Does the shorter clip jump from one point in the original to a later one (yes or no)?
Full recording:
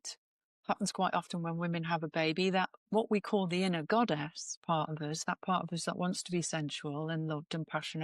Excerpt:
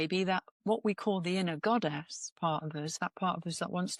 no